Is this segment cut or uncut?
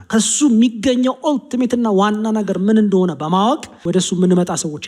cut